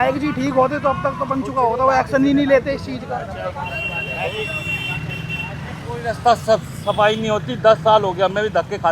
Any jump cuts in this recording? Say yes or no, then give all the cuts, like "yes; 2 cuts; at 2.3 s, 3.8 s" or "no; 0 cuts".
no; 0 cuts